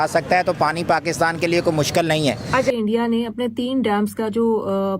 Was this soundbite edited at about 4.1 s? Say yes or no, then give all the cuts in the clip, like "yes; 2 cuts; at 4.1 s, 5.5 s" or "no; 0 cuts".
no; 1 cut; at 2.7 s